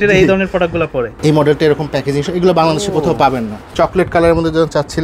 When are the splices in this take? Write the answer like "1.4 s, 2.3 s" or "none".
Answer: 1.1 s, 3.6 s

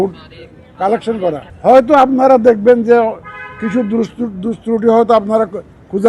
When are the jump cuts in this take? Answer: 1.5 s

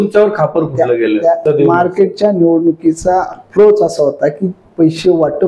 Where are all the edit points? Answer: 1.4 s

